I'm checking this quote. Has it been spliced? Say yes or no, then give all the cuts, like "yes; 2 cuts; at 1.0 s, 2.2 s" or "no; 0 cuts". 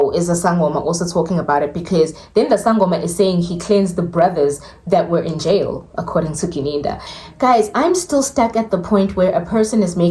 yes; 1 cut; at 7.1 s